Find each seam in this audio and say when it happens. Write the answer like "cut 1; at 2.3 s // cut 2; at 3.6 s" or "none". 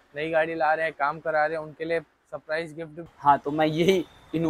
cut 1; at 3.0 s